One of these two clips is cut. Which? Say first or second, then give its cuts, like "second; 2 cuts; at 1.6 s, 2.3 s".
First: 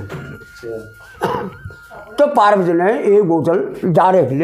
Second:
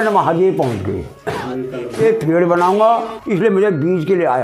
second; 1 cut; at 1.8 s